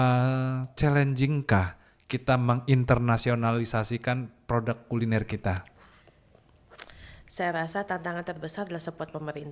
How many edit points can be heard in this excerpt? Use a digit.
0